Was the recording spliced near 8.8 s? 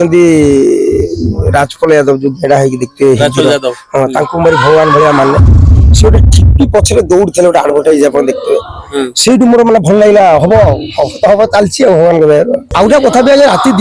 no; 1 cut; at 12.6 s

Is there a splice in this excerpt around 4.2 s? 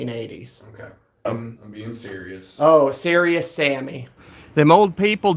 yes; 2 cuts; at 1.3 s, 4.2 s

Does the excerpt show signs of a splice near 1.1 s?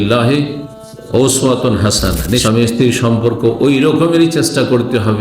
no; 1 cut; at 2.4 s

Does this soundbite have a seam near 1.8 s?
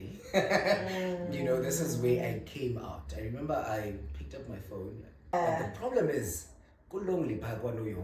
no; 1 cut; at 5.3 s

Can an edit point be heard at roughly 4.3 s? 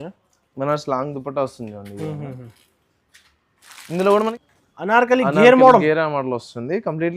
yes; 1 cut; at 4.3 s

